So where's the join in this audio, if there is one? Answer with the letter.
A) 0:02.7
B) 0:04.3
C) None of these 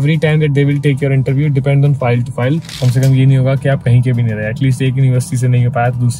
A